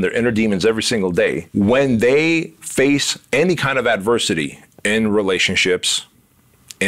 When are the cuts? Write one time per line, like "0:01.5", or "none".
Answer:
0:01.4